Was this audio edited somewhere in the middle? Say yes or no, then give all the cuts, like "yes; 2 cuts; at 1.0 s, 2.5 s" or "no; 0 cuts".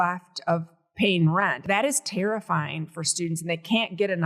yes; 1 cut; at 1.6 s